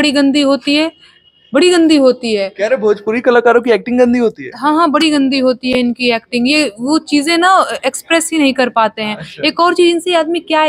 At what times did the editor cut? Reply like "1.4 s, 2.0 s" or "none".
none

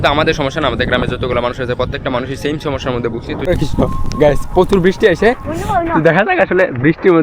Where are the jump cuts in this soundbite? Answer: 3.4 s

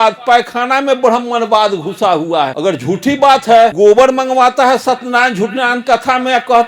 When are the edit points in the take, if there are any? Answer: 2.5 s, 3.7 s

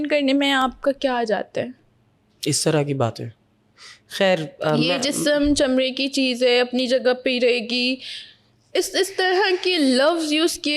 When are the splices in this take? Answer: none

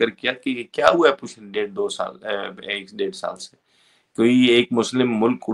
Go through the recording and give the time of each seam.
none

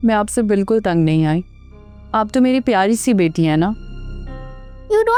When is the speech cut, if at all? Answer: none

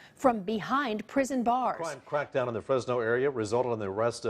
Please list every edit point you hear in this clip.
1.9 s

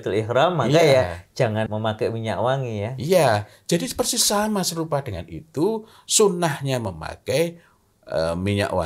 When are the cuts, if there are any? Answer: 1.7 s

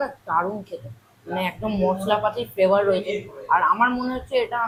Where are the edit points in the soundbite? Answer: none

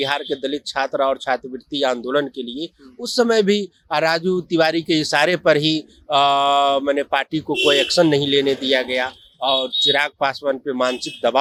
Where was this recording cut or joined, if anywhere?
none

